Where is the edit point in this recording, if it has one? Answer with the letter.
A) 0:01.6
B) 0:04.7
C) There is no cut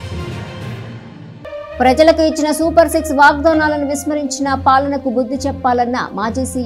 A